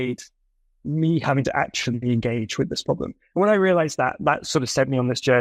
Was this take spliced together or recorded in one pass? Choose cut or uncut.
uncut